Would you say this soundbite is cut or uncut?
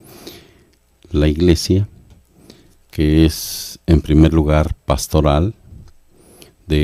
cut